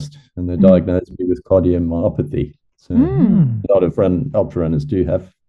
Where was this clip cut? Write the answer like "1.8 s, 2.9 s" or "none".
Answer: none